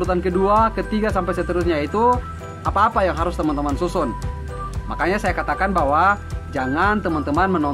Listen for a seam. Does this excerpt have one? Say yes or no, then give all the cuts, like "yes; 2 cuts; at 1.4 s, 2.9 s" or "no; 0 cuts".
no; 0 cuts